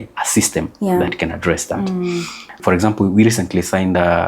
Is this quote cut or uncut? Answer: cut